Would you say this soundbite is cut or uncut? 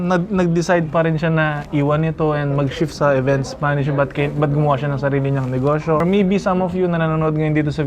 cut